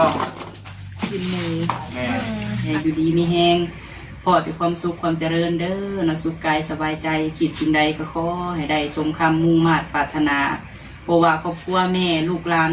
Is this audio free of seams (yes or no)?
no